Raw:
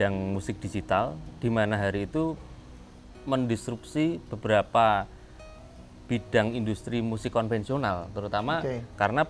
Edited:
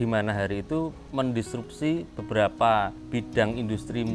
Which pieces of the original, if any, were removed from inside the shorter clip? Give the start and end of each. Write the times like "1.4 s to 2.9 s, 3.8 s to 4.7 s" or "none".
2.4 s to 3.1 s, 5.1 s to 6.0 s

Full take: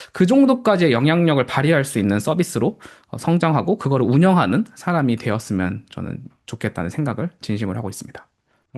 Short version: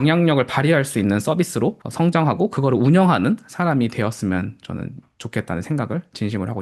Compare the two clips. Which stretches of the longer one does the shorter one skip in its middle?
2.8 s to 3.1 s

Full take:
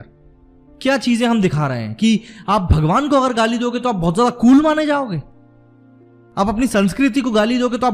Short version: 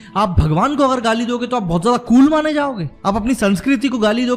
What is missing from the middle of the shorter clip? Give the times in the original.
5.2 s to 6.2 s

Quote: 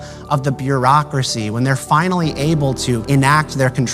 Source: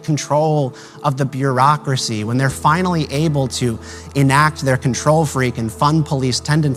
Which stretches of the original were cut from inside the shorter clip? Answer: 3.8 s to 4.1 s

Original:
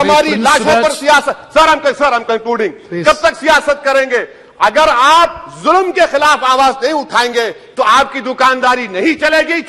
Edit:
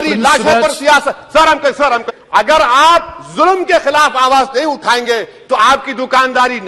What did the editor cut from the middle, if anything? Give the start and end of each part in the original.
2.3 s to 4.4 s

